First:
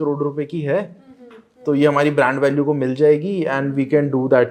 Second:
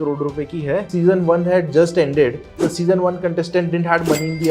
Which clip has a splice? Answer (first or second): second